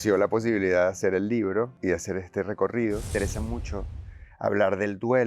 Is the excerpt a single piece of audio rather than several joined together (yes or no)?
no